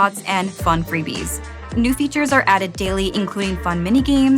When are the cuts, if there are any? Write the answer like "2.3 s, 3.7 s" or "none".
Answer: 1.5 s